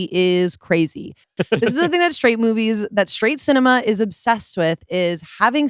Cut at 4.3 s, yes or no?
no